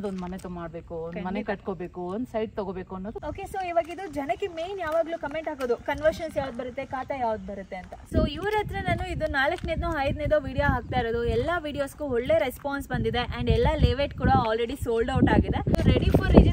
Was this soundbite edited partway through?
yes; 3 cuts; at 3.2 s, 8.0 s, 15.8 s

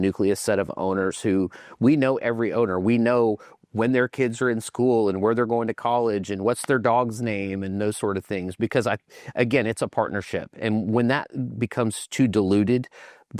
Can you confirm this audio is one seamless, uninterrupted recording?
yes; 0 cuts

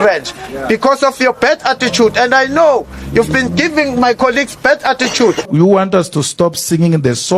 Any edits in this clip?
yes; 1 cut; at 5.5 s

